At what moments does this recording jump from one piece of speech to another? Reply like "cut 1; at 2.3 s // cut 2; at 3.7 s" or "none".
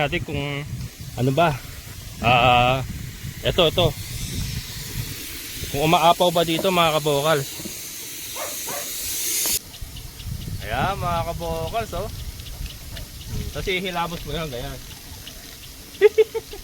cut 1; at 9.6 s